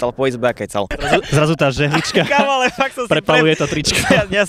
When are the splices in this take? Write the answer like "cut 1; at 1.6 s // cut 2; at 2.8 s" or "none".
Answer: cut 1; at 1.0 s